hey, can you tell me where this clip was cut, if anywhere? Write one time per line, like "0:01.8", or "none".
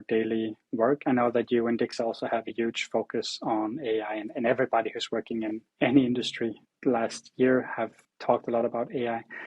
0:05.6
0:06.7
0:08.1